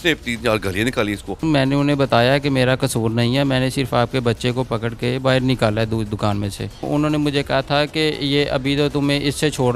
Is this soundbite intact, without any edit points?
no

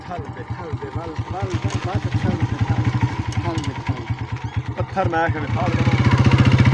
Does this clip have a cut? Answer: yes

